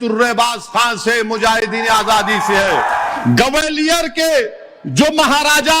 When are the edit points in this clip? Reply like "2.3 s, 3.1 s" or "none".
3.1 s

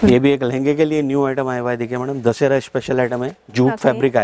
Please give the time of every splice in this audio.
none

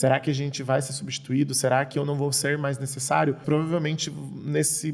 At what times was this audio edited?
3.4 s

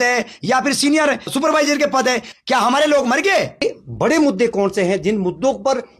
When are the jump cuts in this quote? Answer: 1.3 s, 2.3 s, 3.6 s

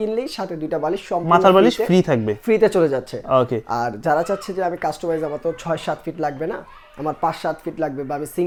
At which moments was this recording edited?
none

